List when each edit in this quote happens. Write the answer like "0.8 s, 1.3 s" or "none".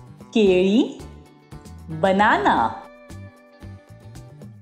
none

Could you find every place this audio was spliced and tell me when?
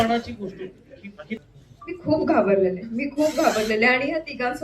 1.4 s

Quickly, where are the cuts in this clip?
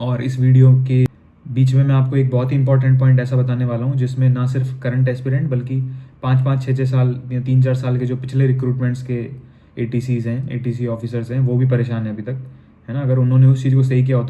1.1 s

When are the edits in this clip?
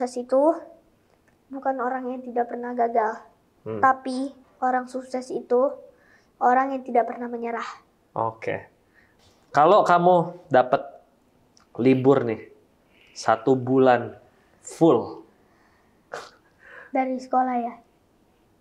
9.0 s

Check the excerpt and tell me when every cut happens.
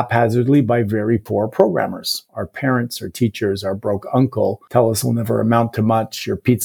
4.6 s

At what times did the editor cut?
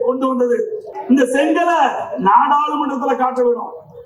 0.9 s

